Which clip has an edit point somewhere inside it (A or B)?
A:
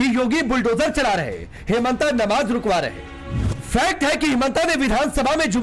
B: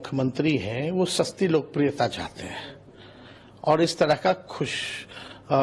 A